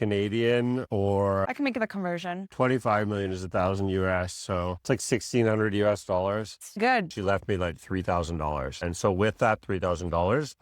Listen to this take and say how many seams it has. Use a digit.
1